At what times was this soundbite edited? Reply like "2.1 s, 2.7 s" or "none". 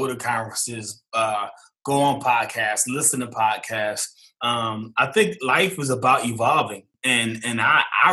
6.9 s